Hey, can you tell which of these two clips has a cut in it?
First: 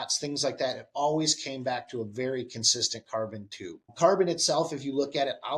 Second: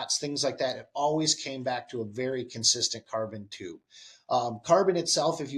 first; 1 cut; at 3.9 s

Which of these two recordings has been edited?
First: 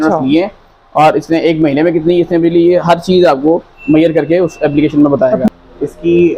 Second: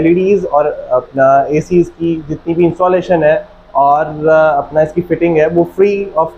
first; 1 cut; at 5.5 s

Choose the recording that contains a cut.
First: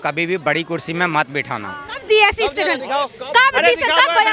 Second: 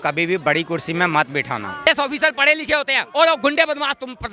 second; 1 cut; at 1.9 s

